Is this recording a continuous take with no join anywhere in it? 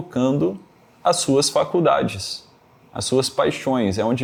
yes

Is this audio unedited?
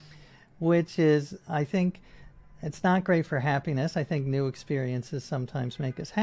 yes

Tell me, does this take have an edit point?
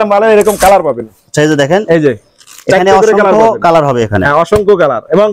no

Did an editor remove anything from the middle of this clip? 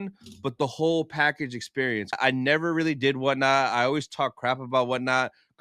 yes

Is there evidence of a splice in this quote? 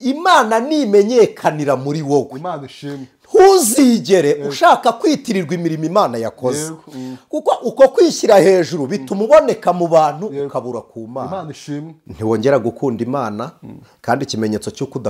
yes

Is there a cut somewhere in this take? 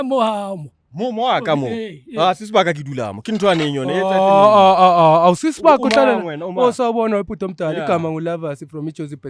no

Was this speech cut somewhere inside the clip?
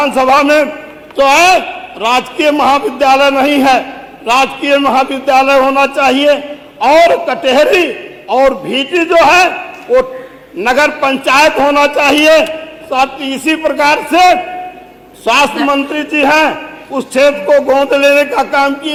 no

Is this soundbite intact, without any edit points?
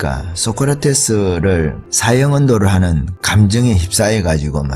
no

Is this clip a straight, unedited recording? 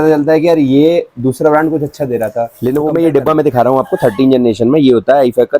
no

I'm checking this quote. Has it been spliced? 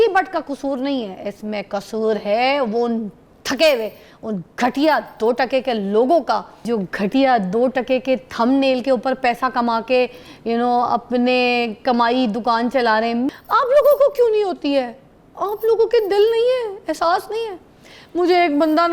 yes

